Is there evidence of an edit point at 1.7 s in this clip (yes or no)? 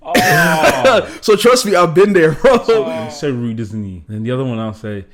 no